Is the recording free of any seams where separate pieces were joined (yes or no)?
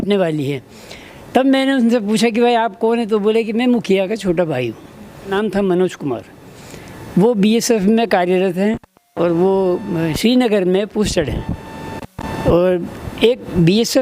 no